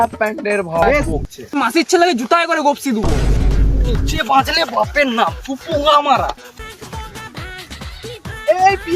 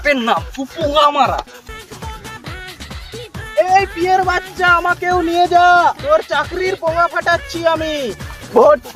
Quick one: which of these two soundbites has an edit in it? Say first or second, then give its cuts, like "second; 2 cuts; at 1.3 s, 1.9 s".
first; 1 cut; at 1.1 s